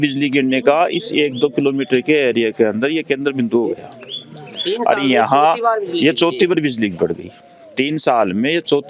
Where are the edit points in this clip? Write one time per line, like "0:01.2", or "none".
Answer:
none